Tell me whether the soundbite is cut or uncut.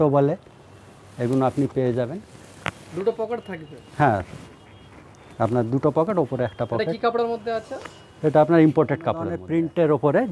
cut